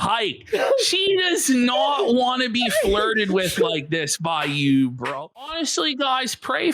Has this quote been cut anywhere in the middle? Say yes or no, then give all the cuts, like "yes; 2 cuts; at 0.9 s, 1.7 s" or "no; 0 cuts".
yes; 1 cut; at 5.4 s